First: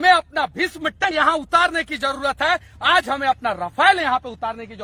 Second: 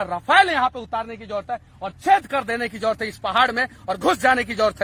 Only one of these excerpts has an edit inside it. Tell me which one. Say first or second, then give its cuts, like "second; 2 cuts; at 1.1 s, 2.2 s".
first; 1 cut; at 1.0 s